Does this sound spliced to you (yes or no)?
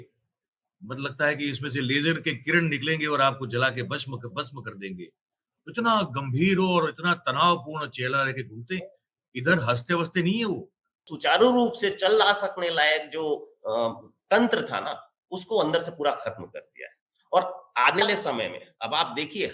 yes